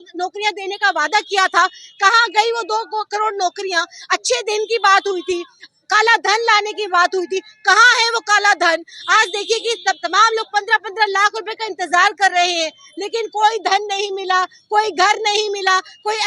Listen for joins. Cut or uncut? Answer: uncut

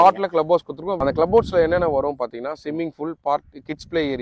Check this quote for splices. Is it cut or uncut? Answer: cut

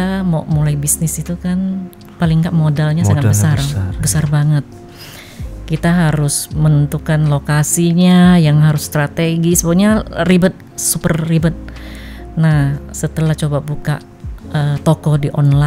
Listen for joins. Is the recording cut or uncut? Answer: uncut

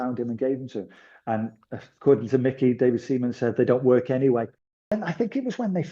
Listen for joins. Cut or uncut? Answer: cut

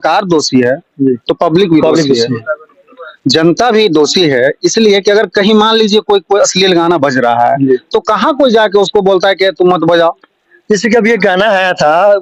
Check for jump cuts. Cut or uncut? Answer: uncut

